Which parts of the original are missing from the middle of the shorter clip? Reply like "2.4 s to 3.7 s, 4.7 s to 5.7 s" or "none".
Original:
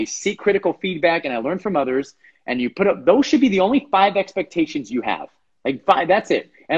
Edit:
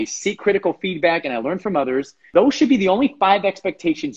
2.3 s to 3.0 s